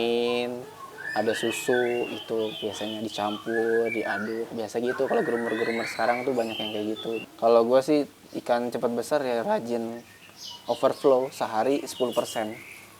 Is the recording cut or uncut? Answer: cut